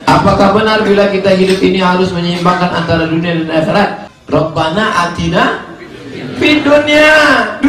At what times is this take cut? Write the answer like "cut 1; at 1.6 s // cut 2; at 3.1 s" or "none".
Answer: cut 1; at 4.1 s